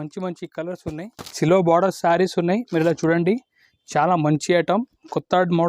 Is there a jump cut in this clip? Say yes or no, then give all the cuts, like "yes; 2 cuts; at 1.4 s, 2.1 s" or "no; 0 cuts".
yes; 1 cut; at 1.4 s